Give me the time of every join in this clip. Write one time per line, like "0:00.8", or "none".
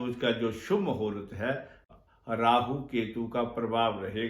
0:01.8